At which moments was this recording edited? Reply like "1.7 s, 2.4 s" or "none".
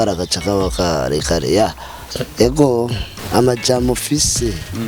3.2 s